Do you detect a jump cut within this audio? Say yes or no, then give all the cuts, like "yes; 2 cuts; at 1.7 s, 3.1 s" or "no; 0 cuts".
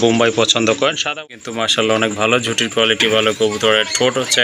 yes; 1 cut; at 1.2 s